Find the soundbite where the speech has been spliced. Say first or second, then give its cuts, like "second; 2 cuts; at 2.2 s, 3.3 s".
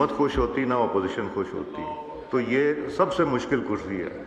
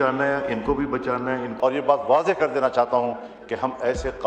second; 1 cut; at 1.5 s